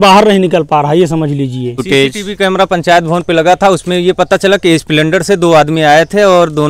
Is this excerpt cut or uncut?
cut